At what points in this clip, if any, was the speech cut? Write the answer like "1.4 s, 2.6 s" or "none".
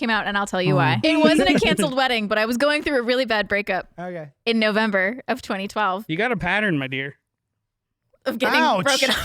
1.0 s